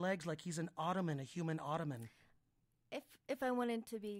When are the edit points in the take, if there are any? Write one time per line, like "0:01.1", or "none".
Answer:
none